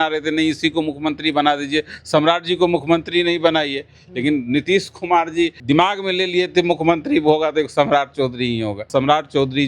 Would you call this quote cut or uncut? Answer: cut